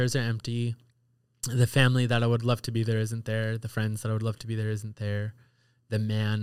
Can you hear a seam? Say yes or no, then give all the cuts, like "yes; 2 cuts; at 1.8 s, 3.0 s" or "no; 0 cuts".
no; 0 cuts